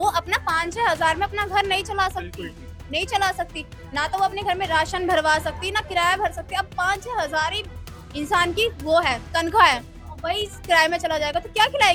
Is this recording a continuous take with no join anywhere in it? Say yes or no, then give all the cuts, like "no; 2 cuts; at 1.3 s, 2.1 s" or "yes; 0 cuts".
yes; 0 cuts